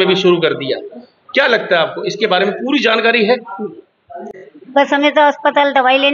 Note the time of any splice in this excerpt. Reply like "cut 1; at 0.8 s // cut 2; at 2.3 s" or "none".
none